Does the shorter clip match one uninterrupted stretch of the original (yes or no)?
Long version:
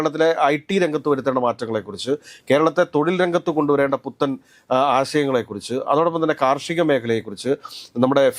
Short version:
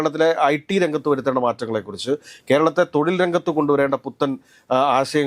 yes